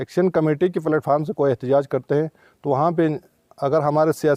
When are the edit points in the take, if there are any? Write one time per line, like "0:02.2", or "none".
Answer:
none